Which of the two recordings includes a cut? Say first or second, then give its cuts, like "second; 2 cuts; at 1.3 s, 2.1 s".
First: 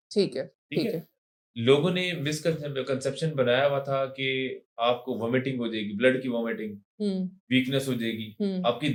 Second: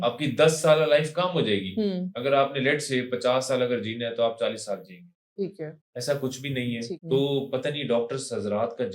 second; 1 cut; at 7.0 s